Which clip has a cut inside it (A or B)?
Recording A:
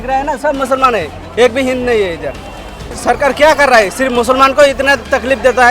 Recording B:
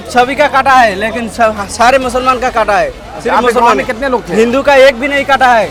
A